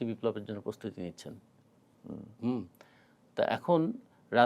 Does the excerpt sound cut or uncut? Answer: uncut